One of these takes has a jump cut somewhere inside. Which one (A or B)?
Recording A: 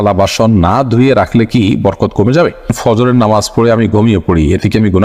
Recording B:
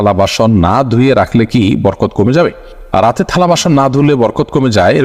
A